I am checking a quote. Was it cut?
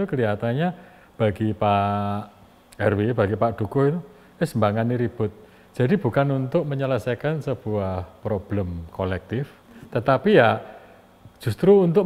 no; 0 cuts

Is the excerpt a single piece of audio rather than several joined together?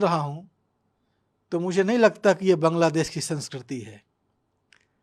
yes; 0 cuts

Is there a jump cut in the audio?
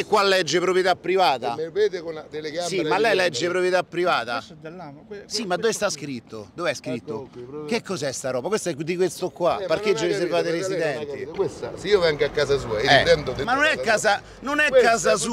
no; 0 cuts

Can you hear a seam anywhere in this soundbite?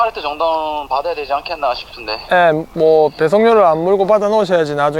no; 0 cuts

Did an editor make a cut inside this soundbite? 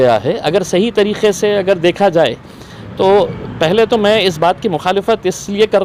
no; 0 cuts

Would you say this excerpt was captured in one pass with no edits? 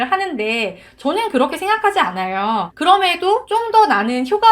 no; 2 cuts; at 2.7 s, 3.5 s

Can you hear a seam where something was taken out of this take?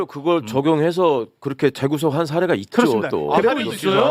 no; 0 cuts

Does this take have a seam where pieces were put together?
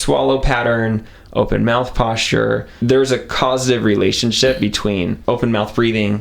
yes; 2 cuts; at 2.7 s, 5.2 s

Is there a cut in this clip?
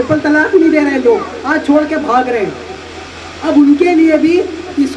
no; 0 cuts

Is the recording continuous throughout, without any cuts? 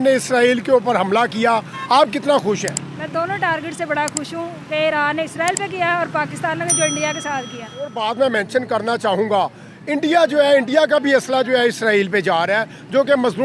no; 1 cut; at 8.0 s

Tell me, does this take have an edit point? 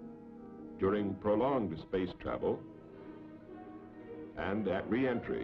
yes; 1 cut; at 1.7 s

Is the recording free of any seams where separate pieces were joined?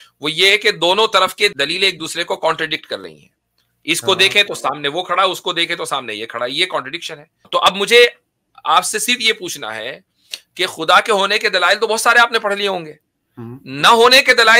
no; 2 cuts; at 1.5 s, 7.4 s

